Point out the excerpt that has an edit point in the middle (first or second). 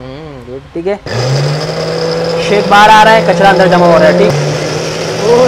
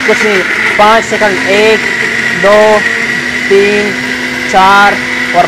first